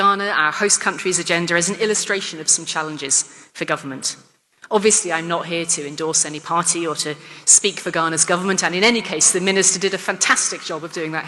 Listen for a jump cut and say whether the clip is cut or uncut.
uncut